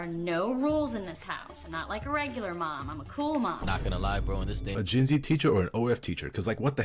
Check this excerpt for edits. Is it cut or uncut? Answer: uncut